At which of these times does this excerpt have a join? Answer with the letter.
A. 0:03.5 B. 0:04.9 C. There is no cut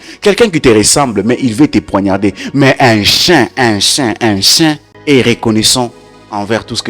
B